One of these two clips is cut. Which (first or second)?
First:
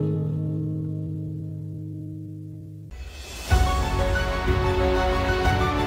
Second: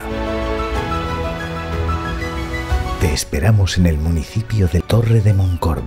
first